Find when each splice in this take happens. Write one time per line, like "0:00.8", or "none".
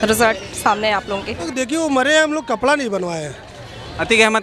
0:01.5